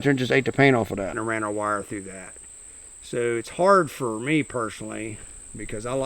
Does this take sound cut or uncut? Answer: cut